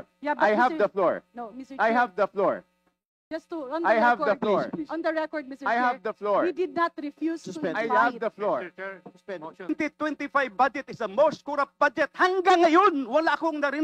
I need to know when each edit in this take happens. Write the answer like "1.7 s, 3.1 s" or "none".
9.7 s